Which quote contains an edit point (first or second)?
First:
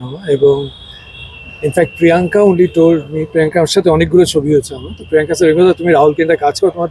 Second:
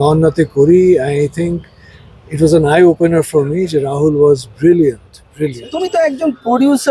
second